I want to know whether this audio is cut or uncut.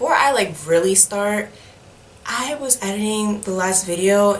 uncut